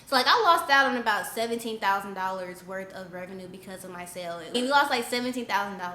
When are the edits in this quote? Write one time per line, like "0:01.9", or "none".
0:04.5

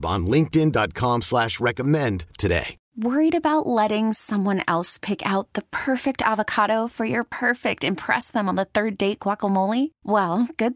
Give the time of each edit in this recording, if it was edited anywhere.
0:02.7

